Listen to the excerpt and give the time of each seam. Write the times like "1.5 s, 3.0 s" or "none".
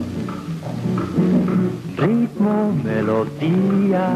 2.8 s